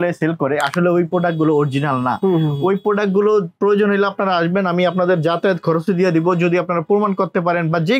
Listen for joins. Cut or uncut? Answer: uncut